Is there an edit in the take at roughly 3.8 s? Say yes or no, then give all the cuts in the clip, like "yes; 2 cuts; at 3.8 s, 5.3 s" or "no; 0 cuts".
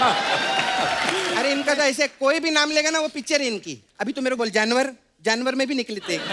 no; 1 cut; at 1.4 s